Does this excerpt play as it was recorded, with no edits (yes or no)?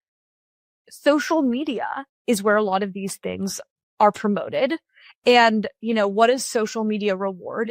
yes